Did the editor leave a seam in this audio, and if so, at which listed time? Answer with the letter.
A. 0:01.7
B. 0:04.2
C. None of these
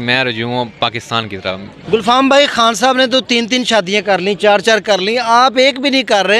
A